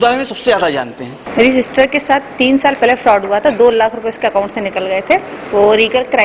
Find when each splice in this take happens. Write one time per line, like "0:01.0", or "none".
0:01.2